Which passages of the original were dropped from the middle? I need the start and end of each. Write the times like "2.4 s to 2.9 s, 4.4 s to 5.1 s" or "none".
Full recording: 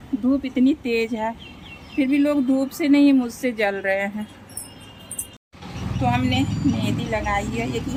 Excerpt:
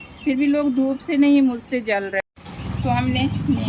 3.8 s to 5.2 s